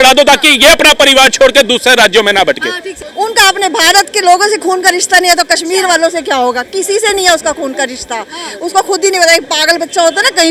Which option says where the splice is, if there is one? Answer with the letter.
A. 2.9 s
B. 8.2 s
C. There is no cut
A